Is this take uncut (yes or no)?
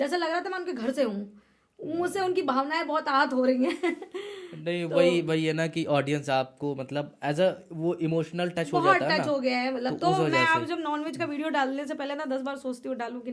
yes